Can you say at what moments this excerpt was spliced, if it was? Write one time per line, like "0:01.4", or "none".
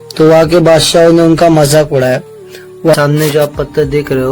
0:02.9